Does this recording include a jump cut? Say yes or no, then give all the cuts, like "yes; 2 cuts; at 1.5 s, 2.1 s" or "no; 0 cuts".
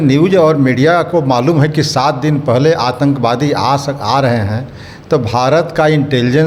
no; 0 cuts